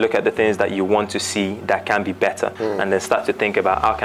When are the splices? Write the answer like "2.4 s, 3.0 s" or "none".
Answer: none

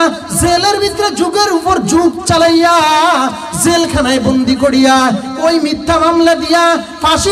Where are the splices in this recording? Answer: none

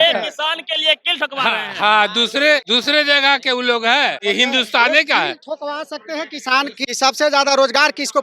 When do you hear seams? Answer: 2.7 s, 4.2 s, 6.8 s

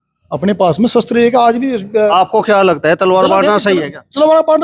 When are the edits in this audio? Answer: 2.1 s

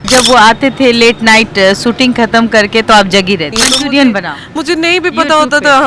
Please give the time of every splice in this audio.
3.5 s

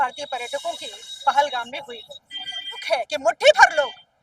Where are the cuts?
2.8 s

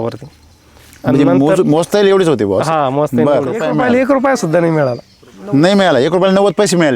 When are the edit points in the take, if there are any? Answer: 3.6 s

